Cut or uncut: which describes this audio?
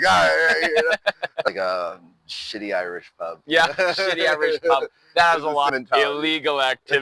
cut